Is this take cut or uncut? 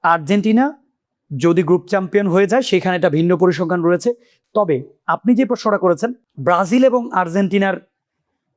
uncut